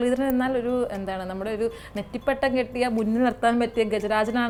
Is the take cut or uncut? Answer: uncut